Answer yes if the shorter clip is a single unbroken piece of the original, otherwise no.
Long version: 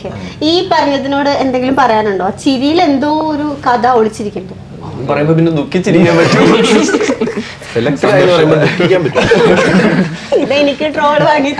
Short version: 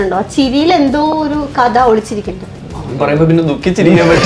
yes